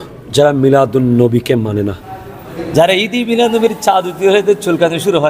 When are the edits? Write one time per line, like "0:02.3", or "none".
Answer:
0:02.6